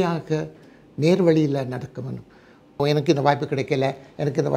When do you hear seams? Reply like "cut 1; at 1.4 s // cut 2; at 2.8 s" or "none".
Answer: cut 1; at 2.8 s